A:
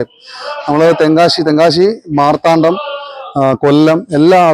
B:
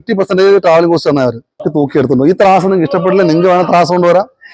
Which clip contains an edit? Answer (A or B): B